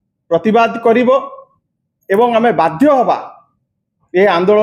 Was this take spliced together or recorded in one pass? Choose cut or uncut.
uncut